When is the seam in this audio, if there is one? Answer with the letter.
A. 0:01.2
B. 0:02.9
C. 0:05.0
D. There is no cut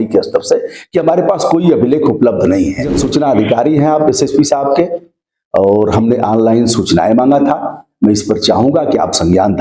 B